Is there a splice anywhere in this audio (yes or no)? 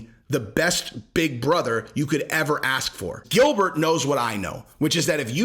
yes